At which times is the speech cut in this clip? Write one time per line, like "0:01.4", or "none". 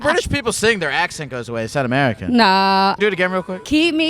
0:03.0